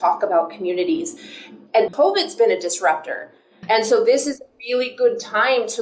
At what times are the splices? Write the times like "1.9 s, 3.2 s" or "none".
1.9 s, 3.6 s